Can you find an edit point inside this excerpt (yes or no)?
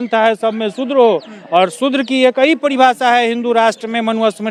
no